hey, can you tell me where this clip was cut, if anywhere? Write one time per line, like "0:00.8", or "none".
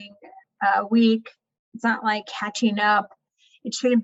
none